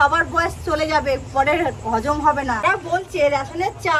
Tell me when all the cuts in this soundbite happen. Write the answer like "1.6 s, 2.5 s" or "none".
none